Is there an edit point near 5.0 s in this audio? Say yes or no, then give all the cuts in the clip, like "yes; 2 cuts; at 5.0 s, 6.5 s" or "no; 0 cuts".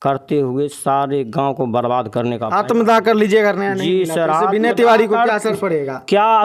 no; 0 cuts